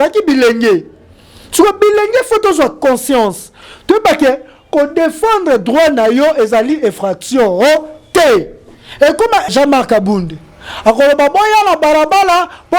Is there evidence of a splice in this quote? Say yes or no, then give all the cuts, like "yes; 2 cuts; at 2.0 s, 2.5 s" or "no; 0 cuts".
yes; 1 cut; at 9.4 s